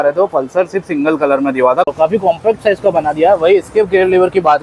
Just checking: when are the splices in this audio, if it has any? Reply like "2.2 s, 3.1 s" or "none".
1.9 s